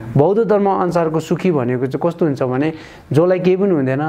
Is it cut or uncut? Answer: uncut